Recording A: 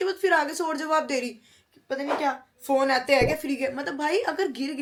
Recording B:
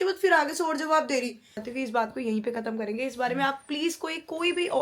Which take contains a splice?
B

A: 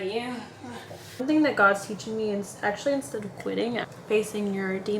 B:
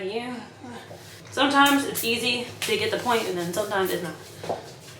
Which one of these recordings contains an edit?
A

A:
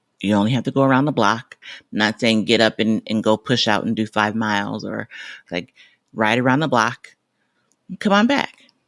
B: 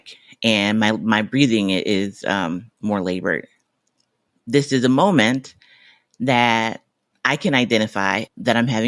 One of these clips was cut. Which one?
A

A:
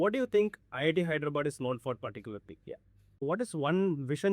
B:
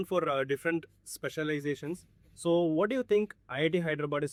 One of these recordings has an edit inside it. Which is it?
A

